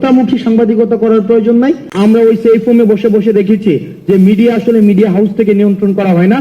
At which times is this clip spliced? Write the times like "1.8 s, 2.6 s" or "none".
1.9 s